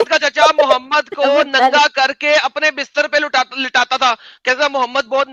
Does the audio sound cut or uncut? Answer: uncut